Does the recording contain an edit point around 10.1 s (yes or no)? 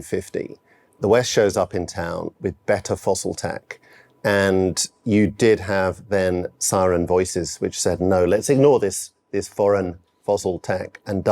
no